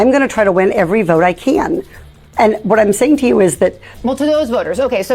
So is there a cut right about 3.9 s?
yes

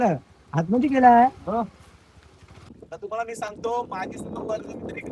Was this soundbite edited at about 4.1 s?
no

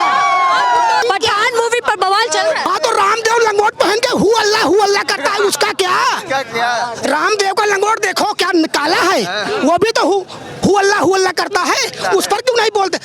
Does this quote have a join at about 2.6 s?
yes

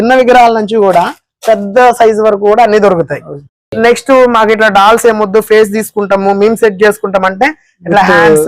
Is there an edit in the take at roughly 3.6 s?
yes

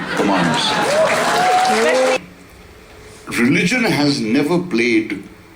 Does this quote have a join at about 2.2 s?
yes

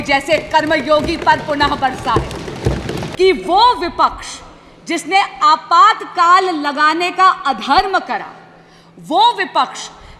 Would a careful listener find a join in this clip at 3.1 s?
yes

